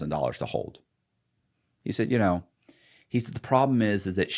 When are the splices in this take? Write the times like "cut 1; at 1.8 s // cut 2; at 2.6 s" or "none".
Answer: none

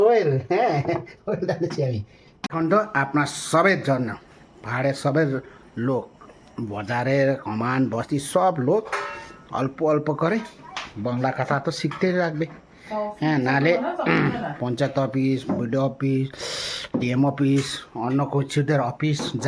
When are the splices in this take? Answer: cut 1; at 2.5 s

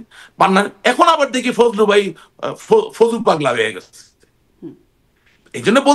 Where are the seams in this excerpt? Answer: none

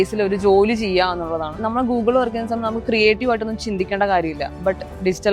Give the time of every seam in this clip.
cut 1; at 1.6 s

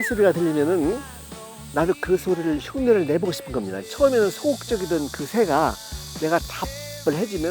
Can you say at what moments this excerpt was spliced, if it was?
cut 1; at 3.8 s

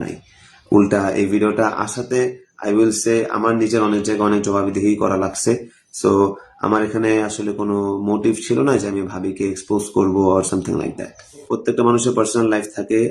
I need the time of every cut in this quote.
cut 1; at 11.5 s

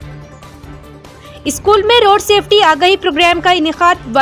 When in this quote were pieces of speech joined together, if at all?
none

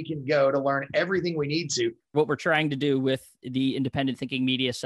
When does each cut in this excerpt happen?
cut 1; at 2.1 s

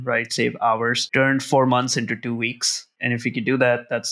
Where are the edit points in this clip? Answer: cut 1; at 1.0 s // cut 2; at 2.9 s

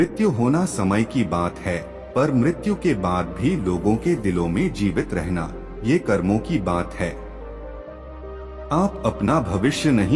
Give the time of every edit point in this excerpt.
none

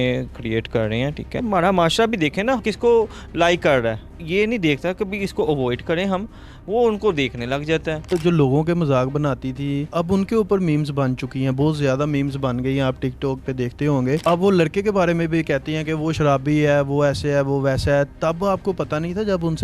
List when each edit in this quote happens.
cut 1; at 1.4 s // cut 2; at 4.2 s // cut 3; at 8.0 s // cut 4; at 14.2 s

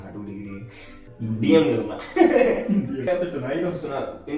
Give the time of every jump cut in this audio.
cut 1; at 1.0 s // cut 2; at 3.0 s

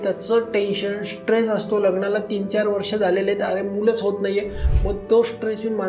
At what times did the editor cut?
none

